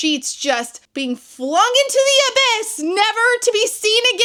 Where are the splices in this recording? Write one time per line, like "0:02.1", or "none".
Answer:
none